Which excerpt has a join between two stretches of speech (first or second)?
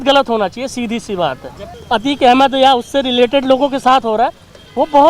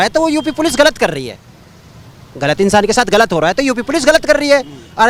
first